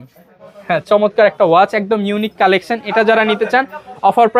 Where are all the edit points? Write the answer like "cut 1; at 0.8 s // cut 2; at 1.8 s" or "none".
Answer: none